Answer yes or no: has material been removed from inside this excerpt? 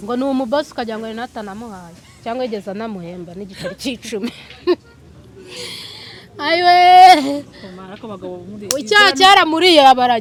no